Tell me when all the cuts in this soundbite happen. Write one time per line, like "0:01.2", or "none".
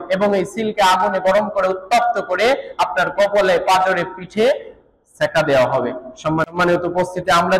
0:06.5